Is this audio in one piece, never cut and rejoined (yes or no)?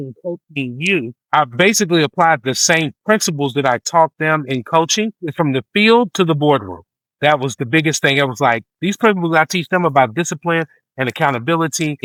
yes